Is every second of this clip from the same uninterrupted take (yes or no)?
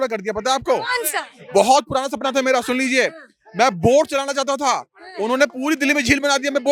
yes